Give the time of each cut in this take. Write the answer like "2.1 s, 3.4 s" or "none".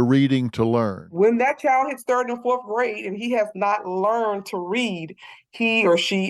1.1 s

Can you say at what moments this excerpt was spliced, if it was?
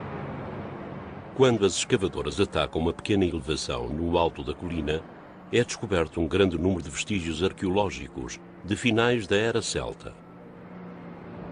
1.3 s

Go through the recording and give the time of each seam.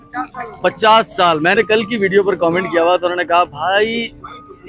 1.6 s

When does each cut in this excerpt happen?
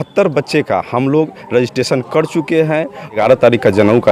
3.2 s

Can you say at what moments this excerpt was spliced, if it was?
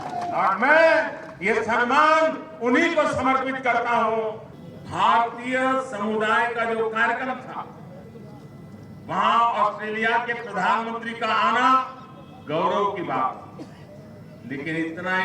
4.5 s

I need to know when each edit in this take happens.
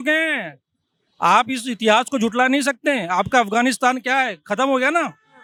none

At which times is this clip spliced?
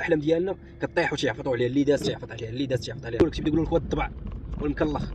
3.2 s

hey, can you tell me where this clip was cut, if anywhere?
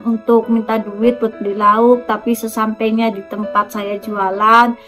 none

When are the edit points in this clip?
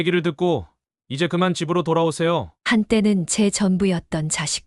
2.5 s

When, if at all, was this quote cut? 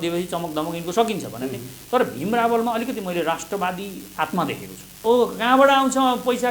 4.9 s

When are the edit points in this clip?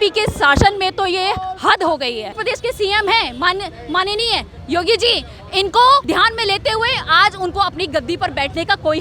2.4 s, 6.1 s

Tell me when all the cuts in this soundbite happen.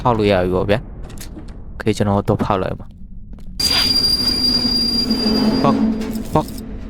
3.6 s

